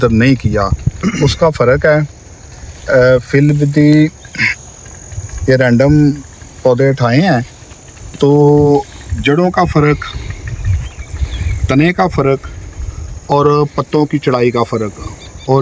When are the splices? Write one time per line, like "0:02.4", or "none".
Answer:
none